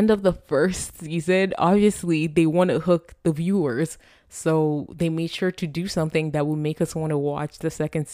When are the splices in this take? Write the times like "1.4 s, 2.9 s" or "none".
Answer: none